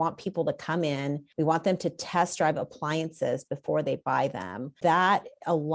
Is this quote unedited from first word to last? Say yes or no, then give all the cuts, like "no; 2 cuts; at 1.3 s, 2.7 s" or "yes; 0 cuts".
no; 2 cuts; at 1.2 s, 4.7 s